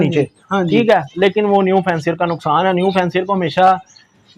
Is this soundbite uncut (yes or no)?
yes